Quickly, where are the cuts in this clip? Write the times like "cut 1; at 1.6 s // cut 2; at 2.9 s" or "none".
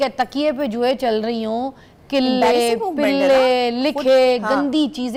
none